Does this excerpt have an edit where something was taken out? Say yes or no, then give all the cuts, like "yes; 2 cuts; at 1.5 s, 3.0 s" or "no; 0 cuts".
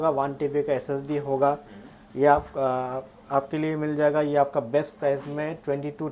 no; 0 cuts